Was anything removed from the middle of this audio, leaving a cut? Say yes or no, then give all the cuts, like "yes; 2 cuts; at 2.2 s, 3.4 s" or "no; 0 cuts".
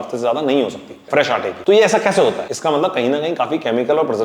yes; 2 cuts; at 1.2 s, 2.5 s